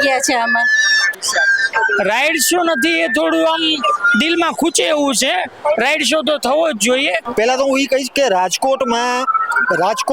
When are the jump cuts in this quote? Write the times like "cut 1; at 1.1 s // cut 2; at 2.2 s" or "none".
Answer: cut 1; at 1.2 s // cut 2; at 7.2 s

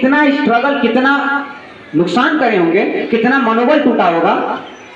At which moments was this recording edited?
none

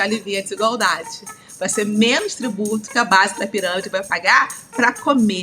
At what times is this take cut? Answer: cut 1; at 4.0 s

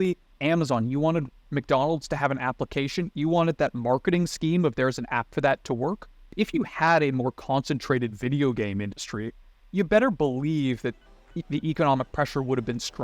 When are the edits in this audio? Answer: cut 1; at 6.2 s

